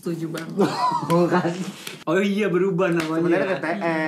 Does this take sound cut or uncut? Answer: cut